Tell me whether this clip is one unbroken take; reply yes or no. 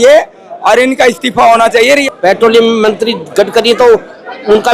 no